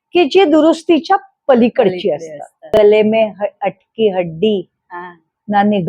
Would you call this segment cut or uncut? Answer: cut